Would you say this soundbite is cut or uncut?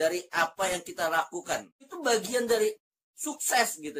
cut